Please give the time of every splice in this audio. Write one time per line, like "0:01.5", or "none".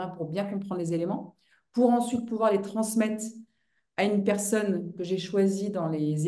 none

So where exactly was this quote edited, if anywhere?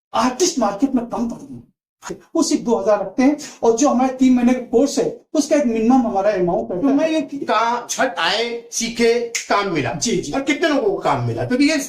0:02.2
0:07.4

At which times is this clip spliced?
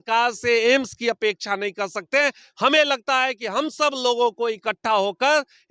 none

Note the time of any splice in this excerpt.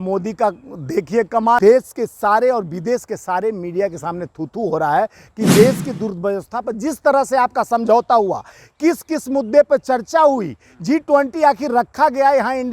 0:01.6

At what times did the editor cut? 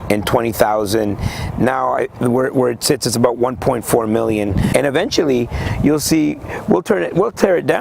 0:04.7

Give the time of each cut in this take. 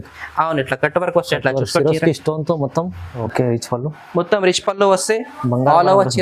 0:03.1

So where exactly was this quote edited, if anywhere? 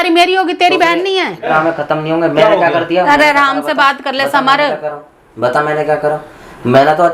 0:01.5

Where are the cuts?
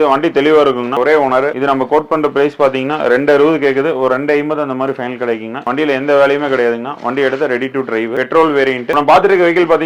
0:01.0
0:05.6
0:08.8

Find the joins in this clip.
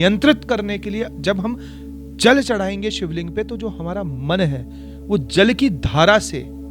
none

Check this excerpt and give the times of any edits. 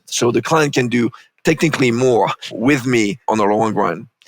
0:01.3
0:02.4
0:03.2

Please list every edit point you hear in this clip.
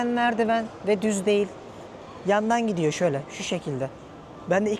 none

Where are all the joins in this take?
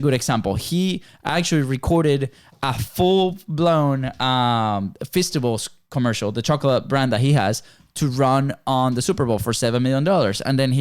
none

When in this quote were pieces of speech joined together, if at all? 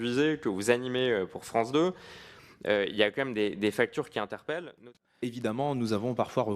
0:04.8

